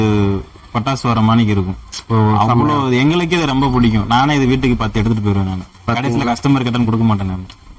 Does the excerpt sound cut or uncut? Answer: uncut